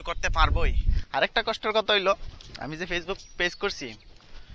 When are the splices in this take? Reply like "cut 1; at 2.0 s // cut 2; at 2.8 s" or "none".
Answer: cut 1; at 1.0 s

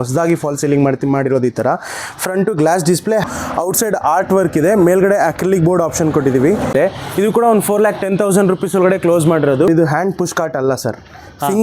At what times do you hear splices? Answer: cut 1; at 3.2 s // cut 2; at 6.7 s // cut 3; at 9.7 s

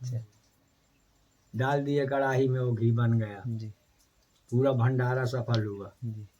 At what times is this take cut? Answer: none

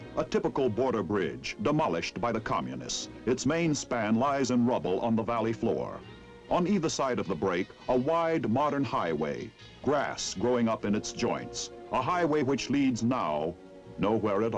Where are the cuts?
cut 1; at 11.7 s

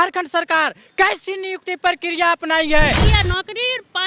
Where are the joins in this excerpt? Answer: cut 1; at 3.1 s

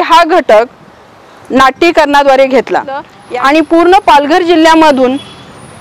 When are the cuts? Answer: cut 1; at 3.1 s

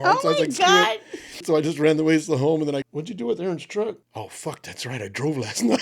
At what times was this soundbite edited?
cut 1; at 1.4 s // cut 2; at 2.8 s // cut 3; at 4.1 s

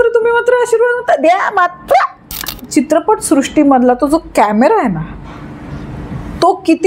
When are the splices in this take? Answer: cut 1; at 2.6 s

